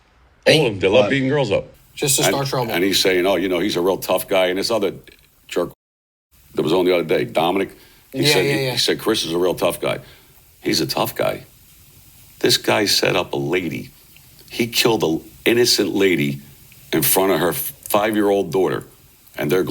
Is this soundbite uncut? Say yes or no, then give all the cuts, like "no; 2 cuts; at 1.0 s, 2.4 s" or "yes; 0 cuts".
no; 1 cut; at 1.7 s